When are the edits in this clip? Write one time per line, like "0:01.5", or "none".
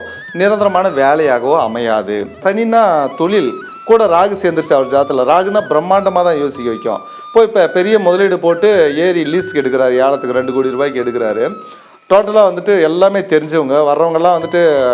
0:02.4